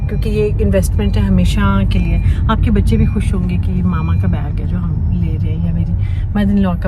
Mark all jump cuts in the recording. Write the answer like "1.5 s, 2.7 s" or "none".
none

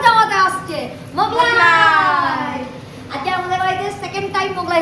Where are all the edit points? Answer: none

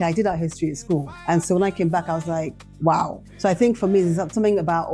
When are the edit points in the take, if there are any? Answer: 1.1 s, 2.6 s, 3.2 s

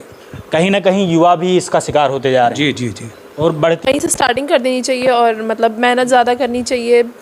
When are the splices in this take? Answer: 3.9 s

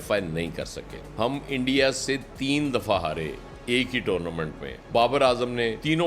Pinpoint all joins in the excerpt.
1.1 s, 4.8 s

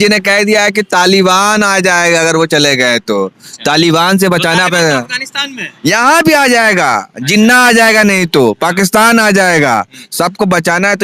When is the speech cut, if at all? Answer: none

